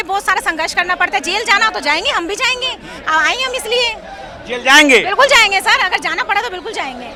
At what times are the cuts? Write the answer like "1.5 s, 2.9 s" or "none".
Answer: none